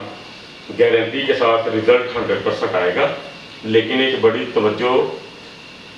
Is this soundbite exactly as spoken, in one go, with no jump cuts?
yes; 0 cuts

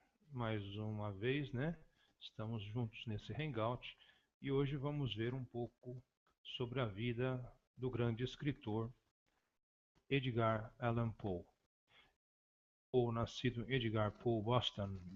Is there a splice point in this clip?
no; 0 cuts

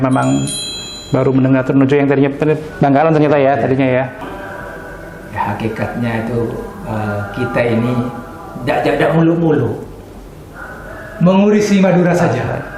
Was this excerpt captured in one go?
no; 1 cut; at 4.3 s

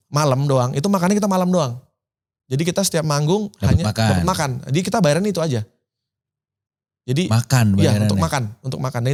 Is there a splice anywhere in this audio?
no; 0 cuts

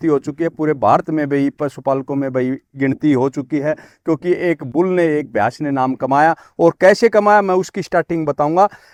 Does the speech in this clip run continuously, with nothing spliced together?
yes; 0 cuts

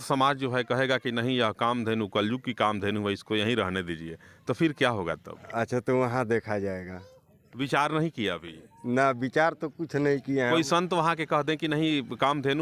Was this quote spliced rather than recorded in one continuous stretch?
no; 0 cuts

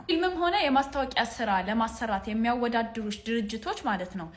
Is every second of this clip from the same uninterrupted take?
yes; 0 cuts

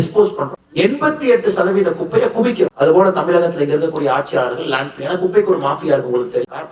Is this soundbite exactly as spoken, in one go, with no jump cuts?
no; 1 cut; at 2.7 s

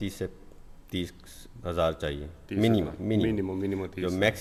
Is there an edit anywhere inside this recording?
no; 0 cuts

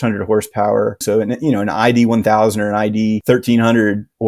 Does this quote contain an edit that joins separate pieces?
yes; 1 cut; at 1.0 s

